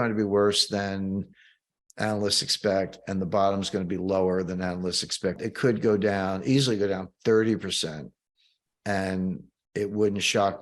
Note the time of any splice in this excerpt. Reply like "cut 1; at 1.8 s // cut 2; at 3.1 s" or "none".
cut 1; at 5.4 s